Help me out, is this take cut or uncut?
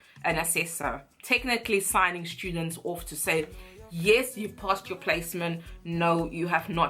uncut